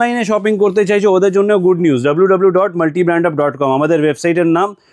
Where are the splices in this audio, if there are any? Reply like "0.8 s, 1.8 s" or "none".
none

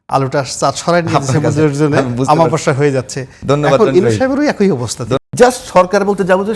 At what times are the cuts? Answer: 5.2 s

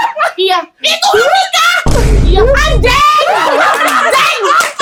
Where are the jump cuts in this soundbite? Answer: none

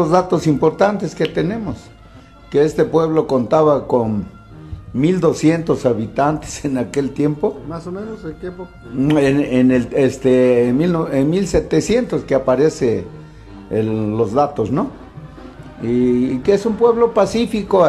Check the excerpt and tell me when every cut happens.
0.9 s

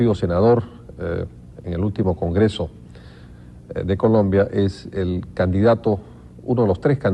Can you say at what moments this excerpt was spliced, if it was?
1.3 s

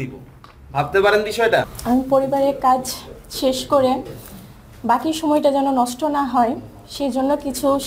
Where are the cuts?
1.7 s

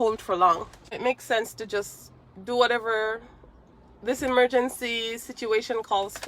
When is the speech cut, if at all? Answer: 1.0 s

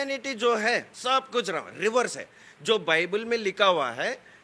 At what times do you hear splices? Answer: 0.9 s

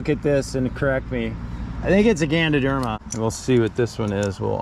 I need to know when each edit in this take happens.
3.0 s

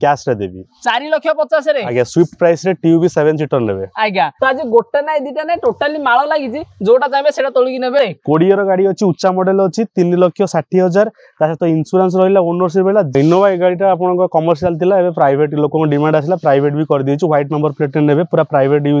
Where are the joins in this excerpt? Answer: 4.3 s, 8.0 s, 13.1 s

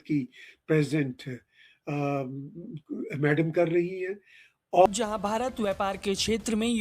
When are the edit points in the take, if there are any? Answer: 4.9 s

